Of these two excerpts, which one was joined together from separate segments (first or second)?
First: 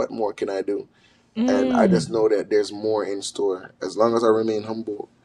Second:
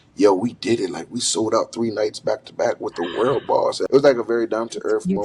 second